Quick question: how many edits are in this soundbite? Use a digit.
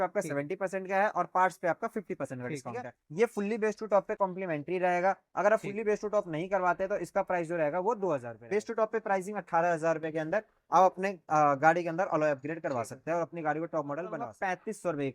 3